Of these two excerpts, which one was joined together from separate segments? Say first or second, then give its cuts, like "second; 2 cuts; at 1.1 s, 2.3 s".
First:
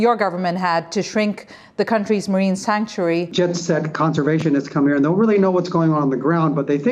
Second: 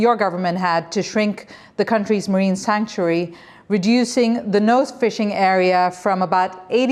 first; 1 cut; at 3.3 s